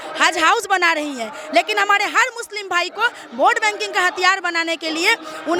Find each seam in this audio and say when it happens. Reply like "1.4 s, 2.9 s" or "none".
none